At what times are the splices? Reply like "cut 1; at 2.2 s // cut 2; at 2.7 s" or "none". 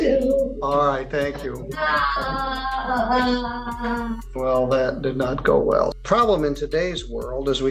cut 1; at 4.2 s // cut 2; at 6.0 s